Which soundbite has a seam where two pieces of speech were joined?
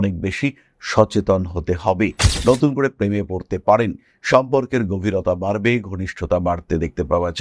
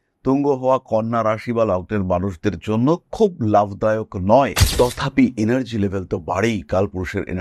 first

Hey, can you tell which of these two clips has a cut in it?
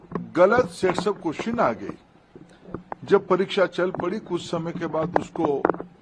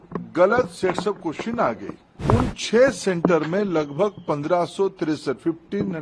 second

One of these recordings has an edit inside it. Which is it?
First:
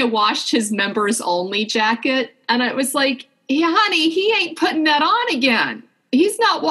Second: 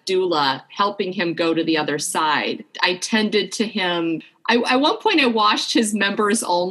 second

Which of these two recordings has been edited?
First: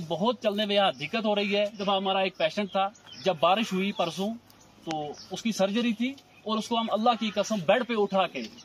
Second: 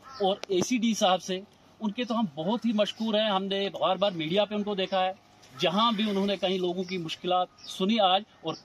first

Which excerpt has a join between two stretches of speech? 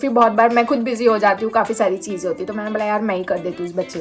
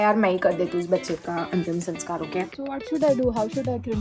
second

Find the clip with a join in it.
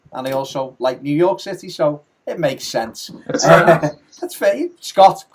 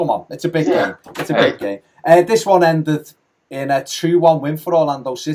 second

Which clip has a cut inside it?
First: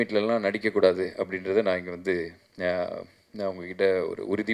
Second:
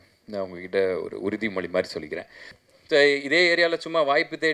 second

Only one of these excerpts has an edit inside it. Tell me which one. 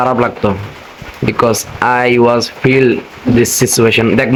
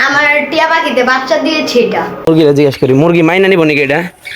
second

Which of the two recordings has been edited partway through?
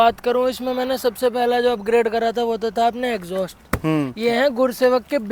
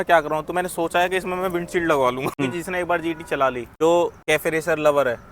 second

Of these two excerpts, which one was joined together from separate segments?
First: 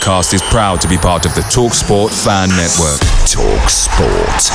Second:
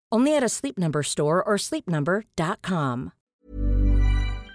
second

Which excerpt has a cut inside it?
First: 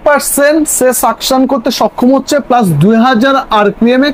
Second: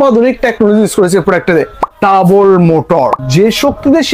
second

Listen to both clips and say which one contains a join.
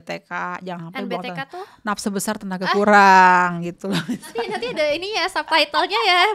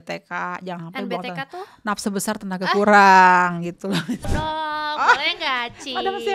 second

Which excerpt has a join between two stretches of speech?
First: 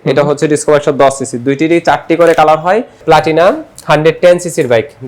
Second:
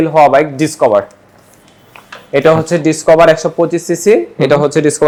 first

